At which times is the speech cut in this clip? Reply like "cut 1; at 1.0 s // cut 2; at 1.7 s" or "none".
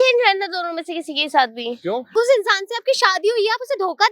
cut 1; at 2.1 s